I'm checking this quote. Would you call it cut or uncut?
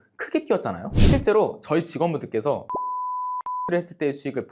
cut